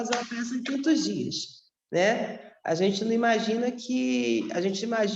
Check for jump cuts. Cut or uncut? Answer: uncut